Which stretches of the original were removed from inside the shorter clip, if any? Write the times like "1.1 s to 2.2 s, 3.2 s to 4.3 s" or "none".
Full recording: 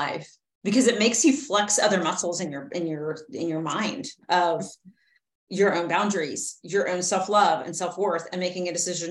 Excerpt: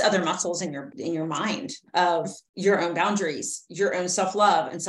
2.7 s to 3.2 s, 4.8 s to 5.4 s